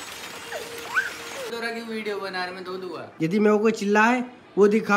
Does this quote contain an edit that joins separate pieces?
yes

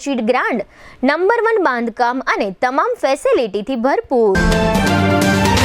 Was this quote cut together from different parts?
yes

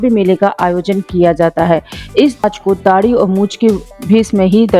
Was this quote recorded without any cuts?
no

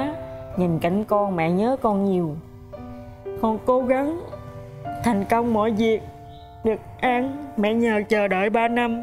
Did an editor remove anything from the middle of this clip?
no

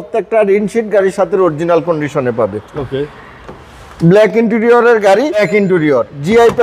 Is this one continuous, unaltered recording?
no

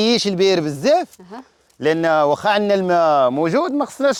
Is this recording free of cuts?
yes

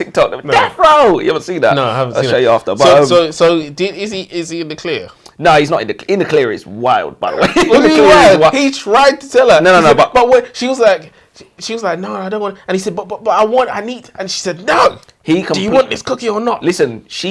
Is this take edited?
no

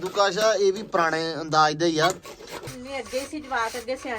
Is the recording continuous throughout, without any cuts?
no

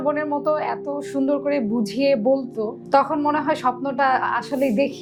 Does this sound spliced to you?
no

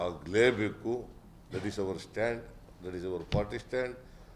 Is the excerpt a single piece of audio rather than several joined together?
yes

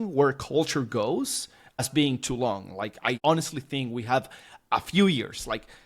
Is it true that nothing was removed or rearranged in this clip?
no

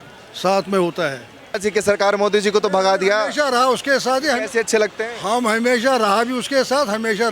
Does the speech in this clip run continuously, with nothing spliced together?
no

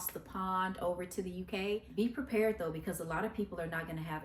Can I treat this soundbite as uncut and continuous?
no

